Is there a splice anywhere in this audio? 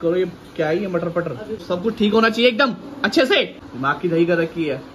yes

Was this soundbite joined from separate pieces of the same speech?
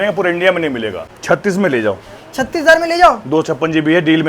yes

